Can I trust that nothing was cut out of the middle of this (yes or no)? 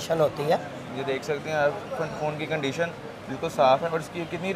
yes